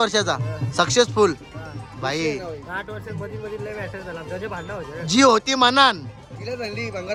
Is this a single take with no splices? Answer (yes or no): yes